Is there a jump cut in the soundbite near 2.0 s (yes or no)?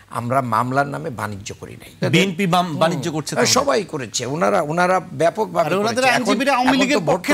yes